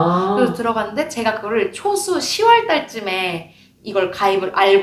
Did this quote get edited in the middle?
no; 0 cuts

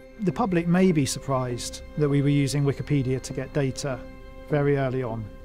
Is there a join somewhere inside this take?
no; 0 cuts

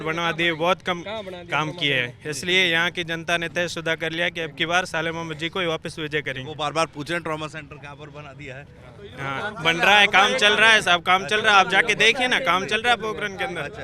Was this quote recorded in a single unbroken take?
yes; 0 cuts

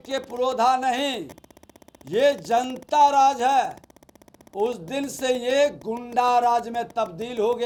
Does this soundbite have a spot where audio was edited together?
no; 0 cuts

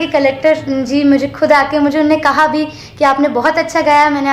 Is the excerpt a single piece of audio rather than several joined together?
yes; 0 cuts

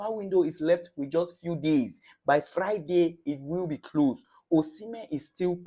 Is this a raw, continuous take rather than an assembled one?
yes; 0 cuts

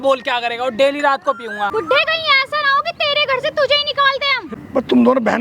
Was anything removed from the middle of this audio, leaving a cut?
yes; 2 cuts; at 1.7 s, 4.5 s

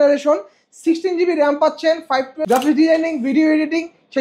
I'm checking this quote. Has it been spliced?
yes; 1 cut; at 2.4 s

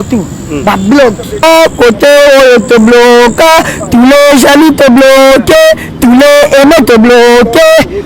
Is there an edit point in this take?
yes; 1 cut; at 1.4 s

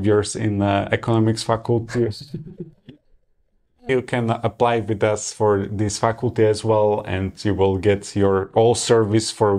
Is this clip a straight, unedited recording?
no; 1 cut; at 3.9 s

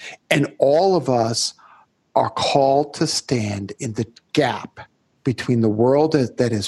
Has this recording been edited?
no; 0 cuts

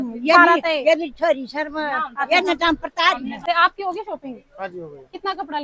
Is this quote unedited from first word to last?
no; 1 cut; at 3.4 s

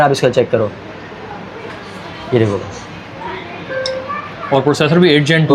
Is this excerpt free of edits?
yes; 0 cuts

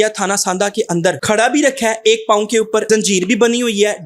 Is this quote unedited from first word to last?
no; 2 cuts; at 1.2 s, 2.8 s

